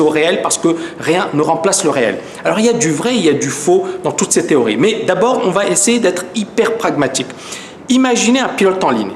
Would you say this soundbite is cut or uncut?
cut